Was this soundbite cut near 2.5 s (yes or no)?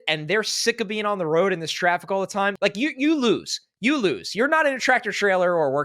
yes